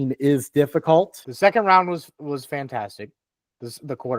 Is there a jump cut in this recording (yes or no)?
yes